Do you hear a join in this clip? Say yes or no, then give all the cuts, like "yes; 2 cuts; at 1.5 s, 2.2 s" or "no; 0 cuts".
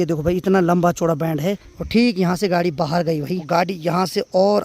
yes; 2 cuts; at 1.7 s, 3.4 s